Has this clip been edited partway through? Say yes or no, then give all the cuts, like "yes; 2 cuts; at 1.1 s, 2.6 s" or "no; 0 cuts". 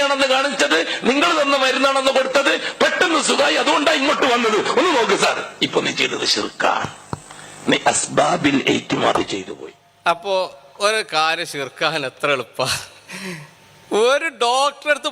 no; 0 cuts